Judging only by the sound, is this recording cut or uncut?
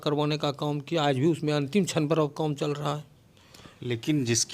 uncut